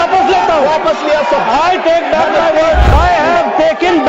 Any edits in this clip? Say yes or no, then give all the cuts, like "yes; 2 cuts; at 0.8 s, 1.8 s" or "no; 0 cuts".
yes; 1 cut; at 2.9 s